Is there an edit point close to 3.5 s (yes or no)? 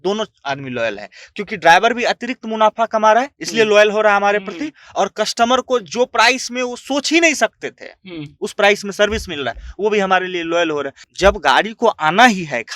no